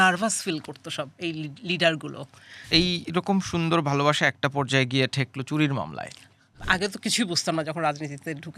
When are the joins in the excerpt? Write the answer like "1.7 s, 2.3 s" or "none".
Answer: 2.6 s, 6.6 s